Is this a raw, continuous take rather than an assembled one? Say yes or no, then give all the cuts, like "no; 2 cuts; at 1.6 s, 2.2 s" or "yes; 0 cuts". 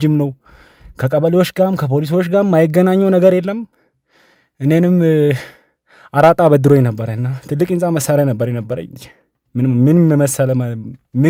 yes; 0 cuts